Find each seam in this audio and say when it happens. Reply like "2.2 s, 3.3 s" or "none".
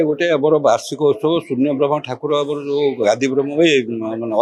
none

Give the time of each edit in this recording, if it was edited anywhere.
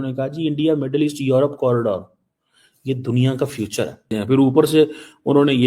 4.1 s

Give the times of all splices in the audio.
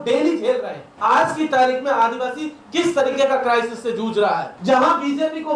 0.9 s, 4.5 s

